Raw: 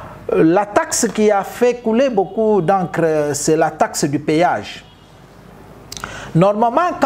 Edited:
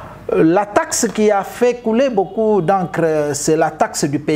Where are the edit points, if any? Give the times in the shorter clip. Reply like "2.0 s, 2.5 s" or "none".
none

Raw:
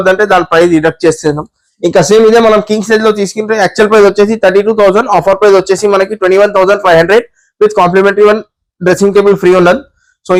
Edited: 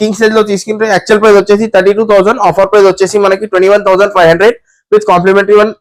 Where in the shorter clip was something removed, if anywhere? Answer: none

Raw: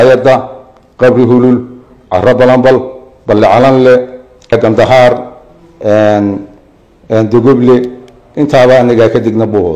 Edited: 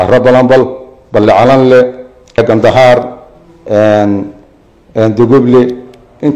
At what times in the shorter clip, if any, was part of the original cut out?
none

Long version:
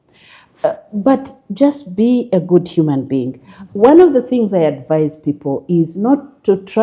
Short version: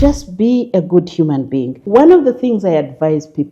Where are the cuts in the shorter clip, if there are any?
1.8 s

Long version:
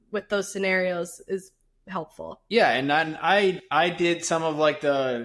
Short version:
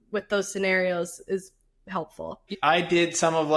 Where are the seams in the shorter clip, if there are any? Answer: 2.5 s

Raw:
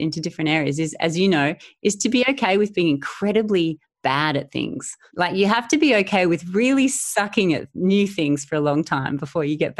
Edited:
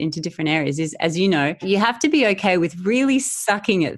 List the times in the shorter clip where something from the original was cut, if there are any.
1.6 s

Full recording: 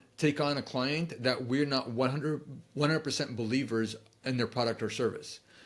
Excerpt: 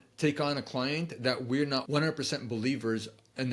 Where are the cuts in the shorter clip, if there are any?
1.8 s

